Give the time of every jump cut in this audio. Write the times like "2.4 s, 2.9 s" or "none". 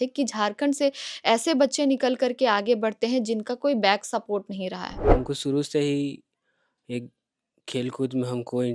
5.0 s